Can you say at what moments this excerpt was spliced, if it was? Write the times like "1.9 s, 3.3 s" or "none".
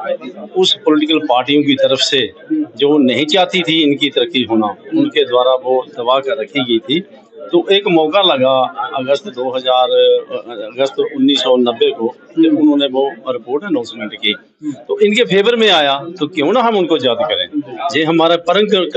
none

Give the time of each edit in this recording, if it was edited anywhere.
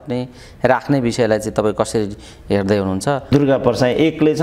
3.3 s

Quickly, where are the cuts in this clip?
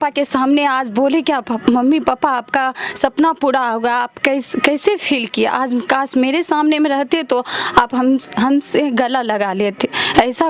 none

